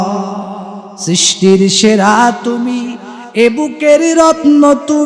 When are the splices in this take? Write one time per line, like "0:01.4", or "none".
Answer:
none